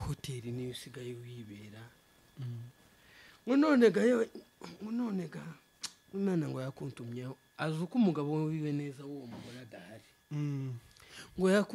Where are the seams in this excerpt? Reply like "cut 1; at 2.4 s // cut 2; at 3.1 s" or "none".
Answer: none